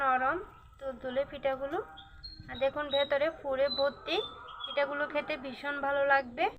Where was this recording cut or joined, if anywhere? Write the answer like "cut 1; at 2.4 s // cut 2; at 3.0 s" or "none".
none